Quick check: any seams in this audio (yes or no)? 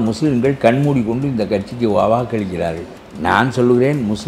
yes